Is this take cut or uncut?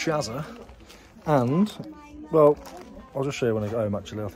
uncut